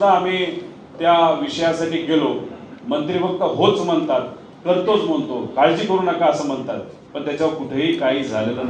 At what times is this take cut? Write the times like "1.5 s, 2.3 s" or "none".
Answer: none